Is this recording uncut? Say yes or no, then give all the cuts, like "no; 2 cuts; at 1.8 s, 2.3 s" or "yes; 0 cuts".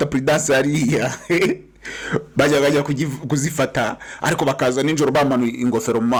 yes; 0 cuts